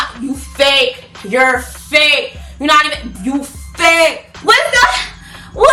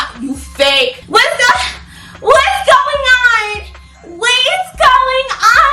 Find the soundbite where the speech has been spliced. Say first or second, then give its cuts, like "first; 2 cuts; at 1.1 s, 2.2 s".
second; 1 cut; at 1.0 s